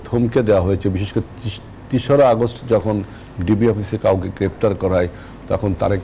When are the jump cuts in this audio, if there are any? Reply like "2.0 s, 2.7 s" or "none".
none